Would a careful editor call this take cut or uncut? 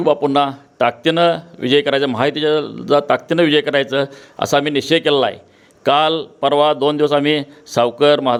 uncut